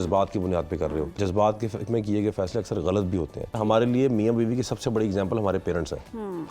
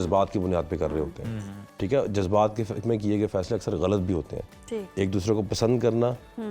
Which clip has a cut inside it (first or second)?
first